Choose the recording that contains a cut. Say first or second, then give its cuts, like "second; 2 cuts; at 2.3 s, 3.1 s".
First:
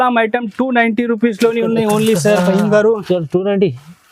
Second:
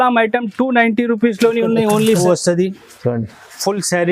second; 1 cut; at 2.2 s